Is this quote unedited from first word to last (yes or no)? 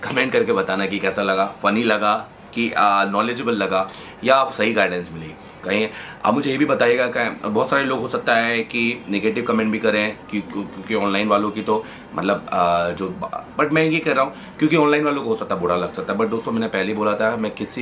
yes